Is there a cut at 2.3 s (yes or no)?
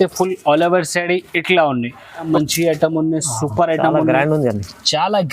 yes